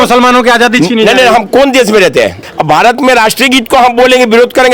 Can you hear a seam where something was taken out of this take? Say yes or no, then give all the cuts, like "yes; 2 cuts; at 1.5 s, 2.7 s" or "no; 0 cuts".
yes; 1 cut; at 2.5 s